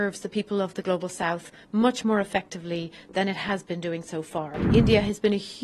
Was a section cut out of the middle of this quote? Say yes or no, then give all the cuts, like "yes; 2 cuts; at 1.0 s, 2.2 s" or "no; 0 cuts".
yes; 1 cut; at 4.6 s